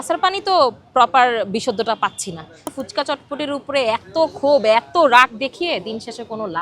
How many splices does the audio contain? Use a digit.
1